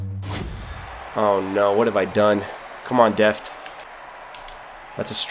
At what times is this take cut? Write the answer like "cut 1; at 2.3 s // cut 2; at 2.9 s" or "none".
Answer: cut 1; at 3.8 s